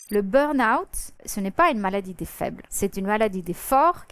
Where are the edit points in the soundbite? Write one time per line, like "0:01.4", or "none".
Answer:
0:01.2
0:02.6

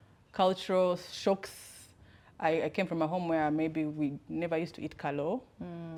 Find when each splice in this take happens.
none

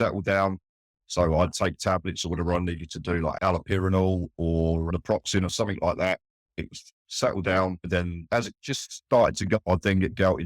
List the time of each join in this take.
0:03.4
0:04.9
0:08.3
0:09.6

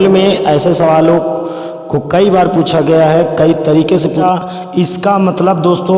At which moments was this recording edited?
0:04.2

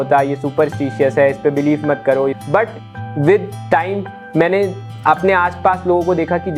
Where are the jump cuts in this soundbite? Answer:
none

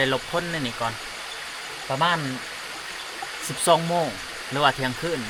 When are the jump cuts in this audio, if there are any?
none

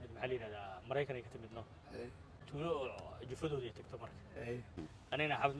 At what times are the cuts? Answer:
0:02.3
0:04.8

